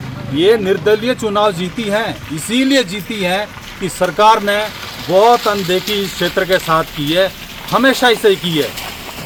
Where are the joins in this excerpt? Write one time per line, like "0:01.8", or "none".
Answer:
none

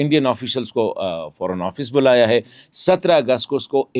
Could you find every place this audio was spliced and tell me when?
none

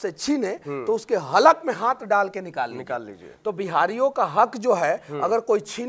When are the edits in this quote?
none

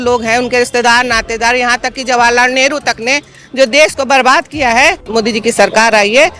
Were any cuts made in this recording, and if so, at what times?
0:05.0

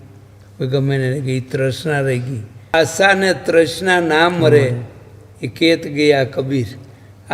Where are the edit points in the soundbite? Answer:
0:02.7

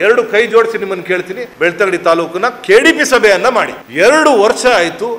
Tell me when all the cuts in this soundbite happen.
0:01.4
0:03.8

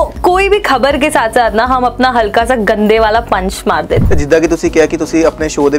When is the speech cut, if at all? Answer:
0:04.0

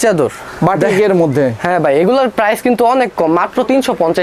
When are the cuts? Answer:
none

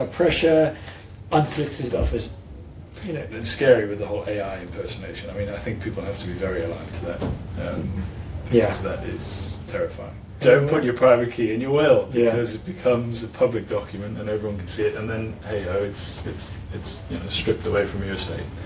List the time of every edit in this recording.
0:03.3
0:10.4

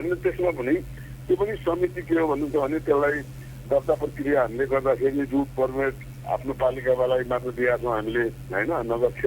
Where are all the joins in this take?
none

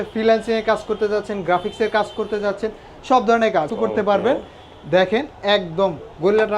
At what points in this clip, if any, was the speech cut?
0:03.7

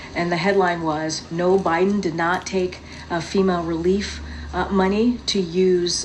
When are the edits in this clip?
none

